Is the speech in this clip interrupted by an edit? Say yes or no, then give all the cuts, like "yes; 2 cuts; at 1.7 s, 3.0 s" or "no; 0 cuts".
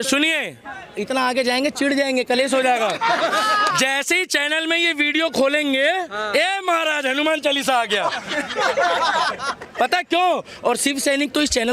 no; 0 cuts